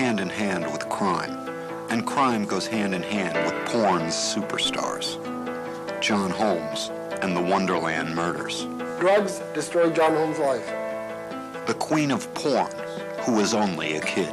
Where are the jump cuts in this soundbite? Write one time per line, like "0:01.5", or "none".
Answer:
none